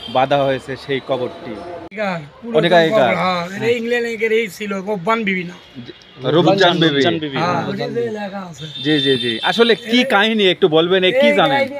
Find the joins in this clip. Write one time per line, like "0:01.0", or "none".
0:01.9